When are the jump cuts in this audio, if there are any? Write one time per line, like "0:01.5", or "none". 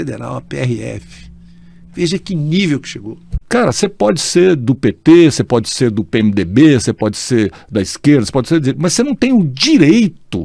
0:03.3